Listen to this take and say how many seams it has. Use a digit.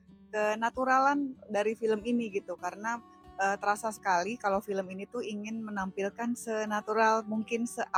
0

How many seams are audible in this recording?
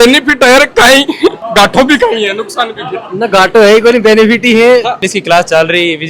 2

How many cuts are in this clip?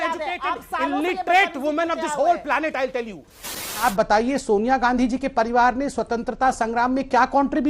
1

